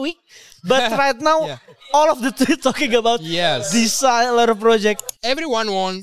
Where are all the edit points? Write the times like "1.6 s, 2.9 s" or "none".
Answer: 5.1 s